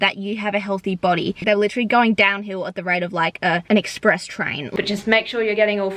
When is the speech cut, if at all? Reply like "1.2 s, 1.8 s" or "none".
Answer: 1.4 s, 3.6 s, 4.6 s